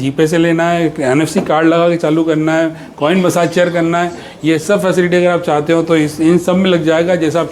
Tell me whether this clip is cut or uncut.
uncut